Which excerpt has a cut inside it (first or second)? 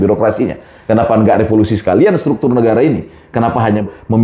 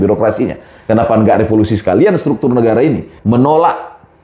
second